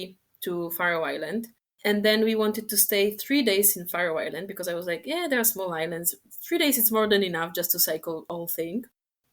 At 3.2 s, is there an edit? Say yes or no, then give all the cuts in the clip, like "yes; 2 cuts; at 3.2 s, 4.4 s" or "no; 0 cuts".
no; 2 cuts; at 1.6 s, 8.3 s